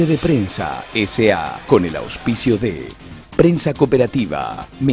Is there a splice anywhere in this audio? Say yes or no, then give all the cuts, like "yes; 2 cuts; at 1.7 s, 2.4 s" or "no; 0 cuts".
yes; 1 cut; at 1.5 s